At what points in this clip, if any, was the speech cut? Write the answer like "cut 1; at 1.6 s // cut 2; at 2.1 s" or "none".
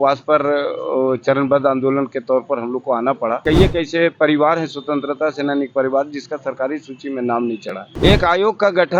cut 1; at 3.4 s // cut 2; at 7.8 s